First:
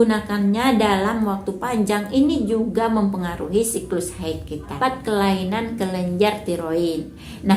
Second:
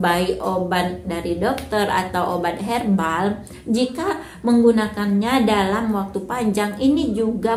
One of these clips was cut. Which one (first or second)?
first